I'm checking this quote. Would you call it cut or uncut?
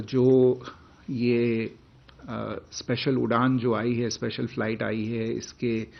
uncut